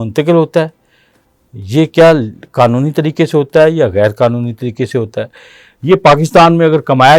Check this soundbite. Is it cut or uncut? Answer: uncut